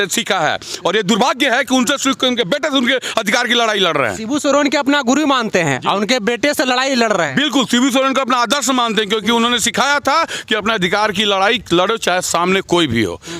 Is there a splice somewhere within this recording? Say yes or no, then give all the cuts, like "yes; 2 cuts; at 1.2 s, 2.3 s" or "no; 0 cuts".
no; 0 cuts